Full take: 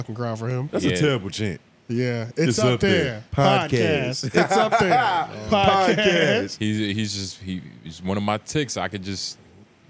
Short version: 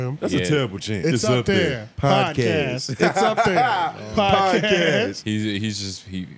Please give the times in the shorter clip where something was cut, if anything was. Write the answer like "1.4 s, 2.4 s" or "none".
1.0 s